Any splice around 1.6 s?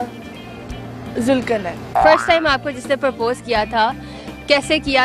yes; 1 cut; at 1.6 s

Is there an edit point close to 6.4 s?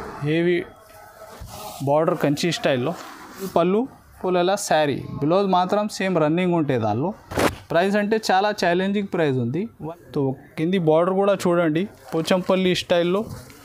no; 2 cuts; at 3.5 s, 9.8 s

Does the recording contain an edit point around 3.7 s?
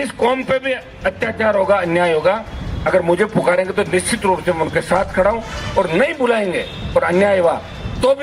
no; 0 cuts

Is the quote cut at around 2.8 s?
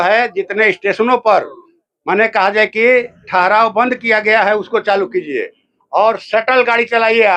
no; 0 cuts

